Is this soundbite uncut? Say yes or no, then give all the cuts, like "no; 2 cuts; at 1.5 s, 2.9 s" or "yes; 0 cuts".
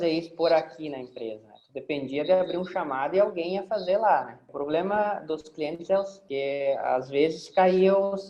no; 2 cuts; at 4.5 s, 6.2 s